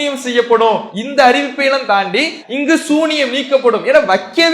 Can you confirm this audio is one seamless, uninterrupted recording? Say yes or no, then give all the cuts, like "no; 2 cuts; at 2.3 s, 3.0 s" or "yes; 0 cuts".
no; 2 cuts; at 1.0 s, 2.4 s